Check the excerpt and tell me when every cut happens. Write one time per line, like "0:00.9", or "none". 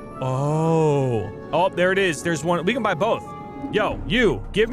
0:03.5